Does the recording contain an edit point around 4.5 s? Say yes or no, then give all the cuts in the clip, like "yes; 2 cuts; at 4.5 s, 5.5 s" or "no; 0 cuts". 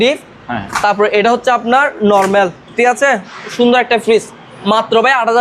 yes; 1 cut; at 4.5 s